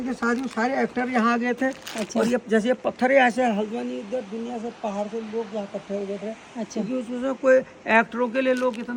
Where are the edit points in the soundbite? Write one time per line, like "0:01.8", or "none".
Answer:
none

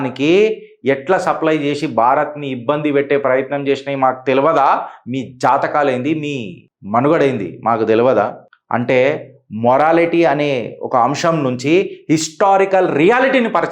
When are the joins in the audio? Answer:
none

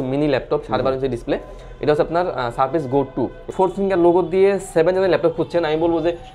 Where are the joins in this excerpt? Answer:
0:03.5

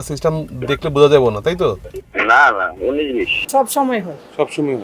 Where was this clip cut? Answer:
0:03.4

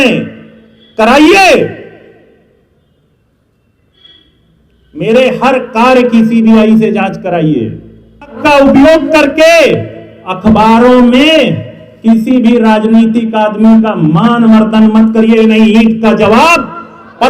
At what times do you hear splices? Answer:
0:08.4

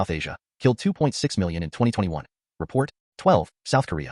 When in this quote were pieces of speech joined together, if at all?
0:03.0

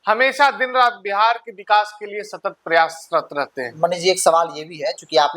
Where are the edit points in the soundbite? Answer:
none

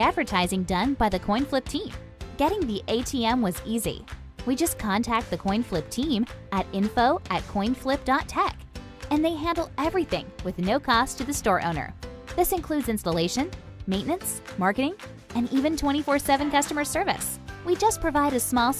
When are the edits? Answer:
none

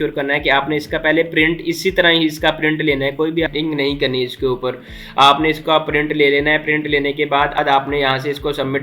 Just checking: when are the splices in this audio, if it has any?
0:03.5
0:07.6

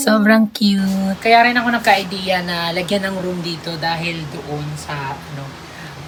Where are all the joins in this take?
none

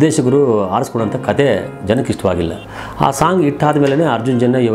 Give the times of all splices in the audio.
0:02.7

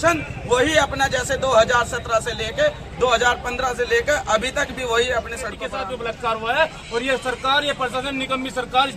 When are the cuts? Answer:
0:05.6

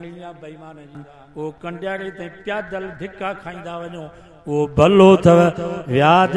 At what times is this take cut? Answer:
0:01.1

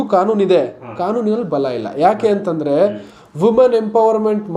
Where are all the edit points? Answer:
none

